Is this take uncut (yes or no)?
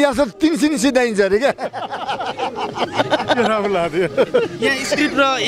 yes